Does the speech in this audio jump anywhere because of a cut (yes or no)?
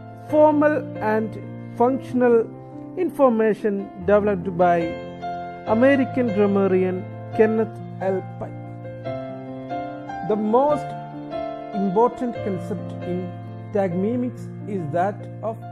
yes